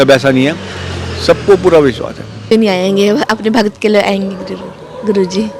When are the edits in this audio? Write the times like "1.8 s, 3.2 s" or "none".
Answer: 2.4 s